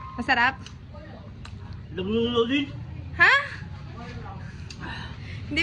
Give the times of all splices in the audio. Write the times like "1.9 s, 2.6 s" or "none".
none